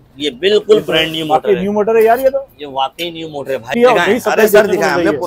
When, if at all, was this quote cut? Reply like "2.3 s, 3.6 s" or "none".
3.7 s